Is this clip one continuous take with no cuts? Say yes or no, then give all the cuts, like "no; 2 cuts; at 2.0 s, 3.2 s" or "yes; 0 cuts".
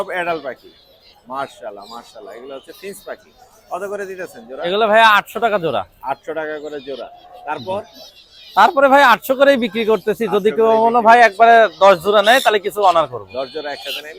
yes; 0 cuts